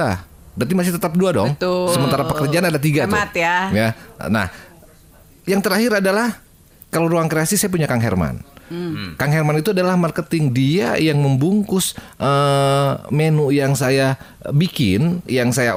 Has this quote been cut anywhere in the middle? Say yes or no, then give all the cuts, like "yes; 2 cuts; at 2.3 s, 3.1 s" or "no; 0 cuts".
no; 0 cuts